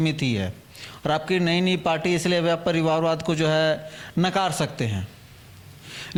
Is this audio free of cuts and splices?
yes; 0 cuts

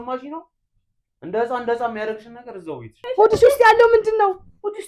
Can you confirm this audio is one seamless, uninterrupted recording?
no; 1 cut; at 3.0 s

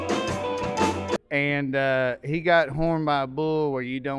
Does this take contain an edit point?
yes; 1 cut; at 1.2 s

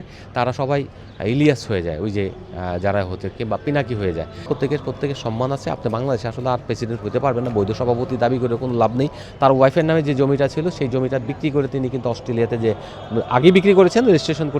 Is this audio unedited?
no; 2 cuts; at 4.4 s, 9.2 s

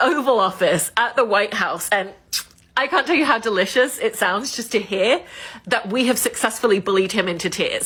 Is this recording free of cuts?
yes; 0 cuts

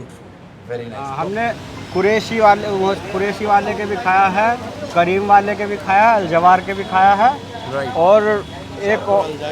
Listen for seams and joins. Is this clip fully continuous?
no; 1 cut; at 1.1 s

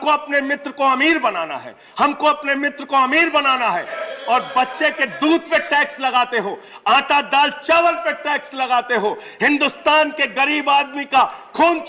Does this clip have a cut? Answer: yes; 1 cut; at 4.0 s

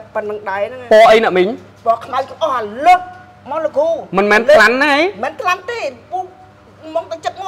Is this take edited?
no; 0 cuts

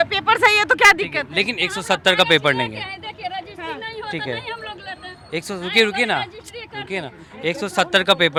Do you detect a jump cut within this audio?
no; 0 cuts

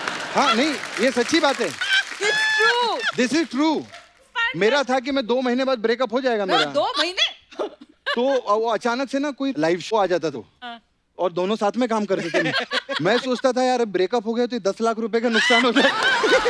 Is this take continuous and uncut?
yes; 0 cuts

